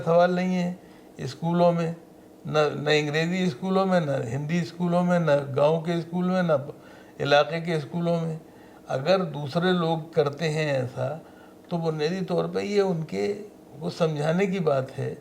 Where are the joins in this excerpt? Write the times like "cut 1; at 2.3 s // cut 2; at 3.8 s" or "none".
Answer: none